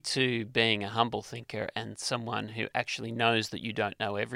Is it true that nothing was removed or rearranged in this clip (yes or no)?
yes